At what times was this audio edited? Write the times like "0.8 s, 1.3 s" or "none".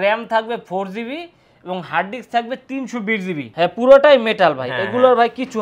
3.5 s